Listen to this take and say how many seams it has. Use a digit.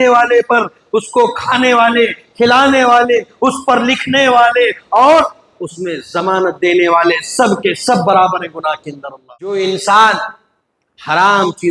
1